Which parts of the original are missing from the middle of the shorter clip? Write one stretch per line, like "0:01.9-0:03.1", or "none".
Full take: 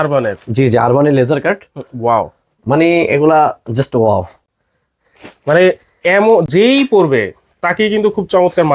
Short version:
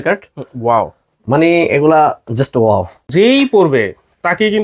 0:04.5-0:06.5